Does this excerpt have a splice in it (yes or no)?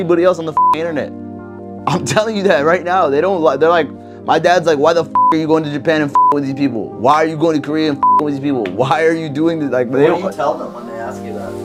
no